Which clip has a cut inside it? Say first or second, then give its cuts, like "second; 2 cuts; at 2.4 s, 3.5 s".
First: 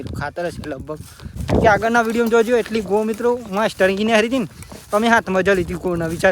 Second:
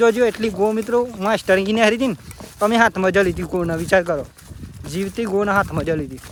first; 1 cut; at 1.4 s